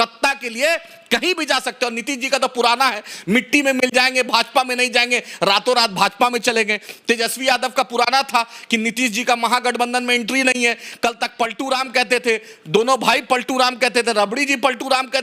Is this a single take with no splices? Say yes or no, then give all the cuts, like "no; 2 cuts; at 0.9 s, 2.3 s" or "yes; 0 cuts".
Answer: yes; 0 cuts